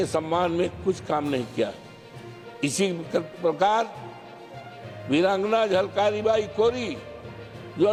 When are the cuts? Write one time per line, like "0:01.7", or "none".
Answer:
none